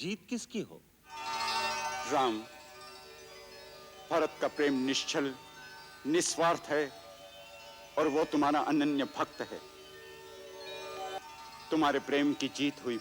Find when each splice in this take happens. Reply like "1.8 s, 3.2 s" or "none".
1.3 s, 11.2 s